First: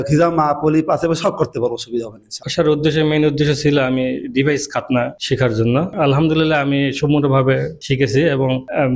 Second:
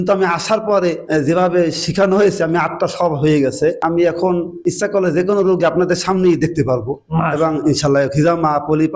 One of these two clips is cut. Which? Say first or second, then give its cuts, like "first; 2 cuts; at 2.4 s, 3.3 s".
first; 2 cuts; at 2.4 s, 5.9 s